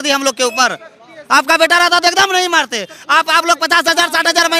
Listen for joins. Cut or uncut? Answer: uncut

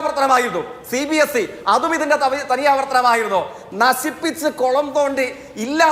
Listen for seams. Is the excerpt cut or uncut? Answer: uncut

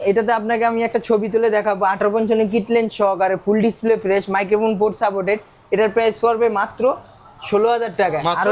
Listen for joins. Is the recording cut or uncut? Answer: uncut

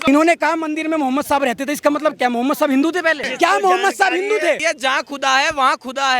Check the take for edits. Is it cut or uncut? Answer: cut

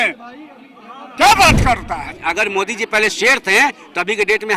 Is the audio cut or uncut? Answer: cut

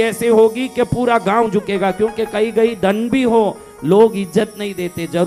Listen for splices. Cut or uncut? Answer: uncut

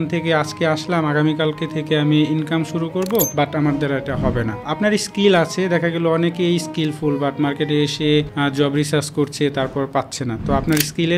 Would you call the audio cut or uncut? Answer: cut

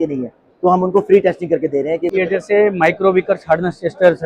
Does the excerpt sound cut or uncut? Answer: cut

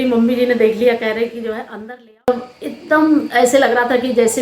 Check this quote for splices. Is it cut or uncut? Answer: cut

